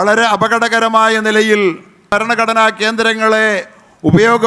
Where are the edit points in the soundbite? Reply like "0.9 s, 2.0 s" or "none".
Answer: 2.1 s